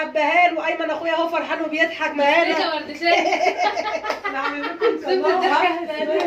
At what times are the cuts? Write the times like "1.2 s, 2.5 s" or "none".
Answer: none

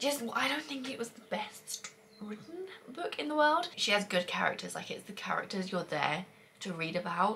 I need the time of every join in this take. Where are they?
3.8 s

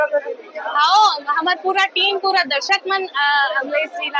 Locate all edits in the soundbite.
none

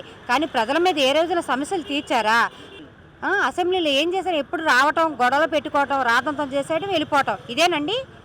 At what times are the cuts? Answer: 2.6 s

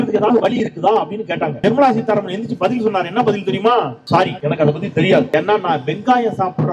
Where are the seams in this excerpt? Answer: 1.5 s, 4.1 s, 5.3 s

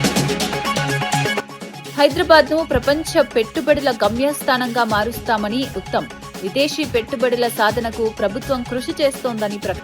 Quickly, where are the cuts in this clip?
1.5 s

